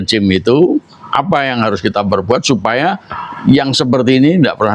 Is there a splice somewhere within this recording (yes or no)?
no